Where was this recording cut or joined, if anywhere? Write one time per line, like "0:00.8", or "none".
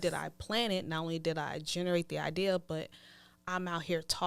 none